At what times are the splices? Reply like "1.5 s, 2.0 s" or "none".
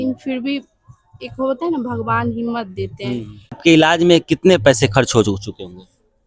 3.6 s